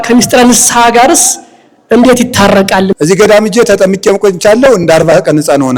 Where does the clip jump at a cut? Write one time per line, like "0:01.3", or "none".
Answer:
0:02.9